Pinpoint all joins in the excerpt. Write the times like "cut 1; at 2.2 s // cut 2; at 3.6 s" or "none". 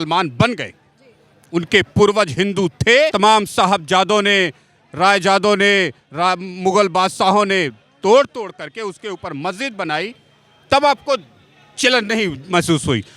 cut 1; at 3.1 s